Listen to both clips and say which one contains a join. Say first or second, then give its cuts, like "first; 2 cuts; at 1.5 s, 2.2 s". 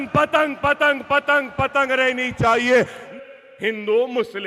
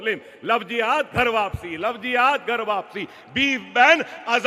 first; 1 cut; at 3.1 s